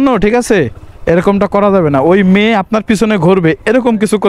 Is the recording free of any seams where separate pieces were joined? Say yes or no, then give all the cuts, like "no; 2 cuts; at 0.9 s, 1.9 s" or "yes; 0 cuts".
yes; 0 cuts